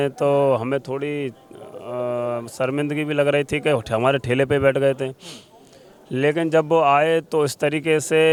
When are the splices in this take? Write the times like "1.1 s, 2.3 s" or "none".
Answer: none